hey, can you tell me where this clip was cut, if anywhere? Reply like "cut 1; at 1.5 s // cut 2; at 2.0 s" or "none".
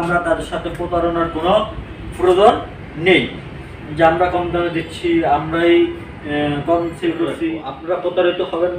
cut 1; at 7.7 s